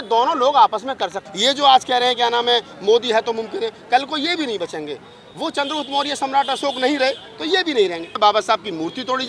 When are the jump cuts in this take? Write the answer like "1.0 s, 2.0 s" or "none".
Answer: 1.2 s, 8.1 s